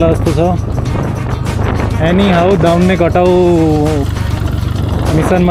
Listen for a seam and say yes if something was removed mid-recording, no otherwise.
no